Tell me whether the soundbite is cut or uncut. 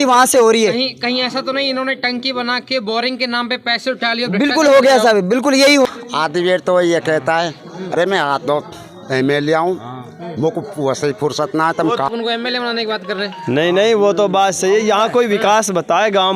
cut